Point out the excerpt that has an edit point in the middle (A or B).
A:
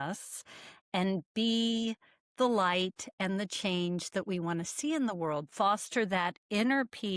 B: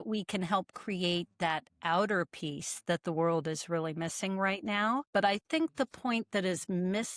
B